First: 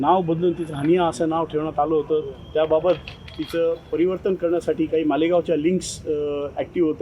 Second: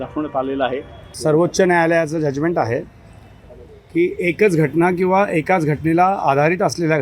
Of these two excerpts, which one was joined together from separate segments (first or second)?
second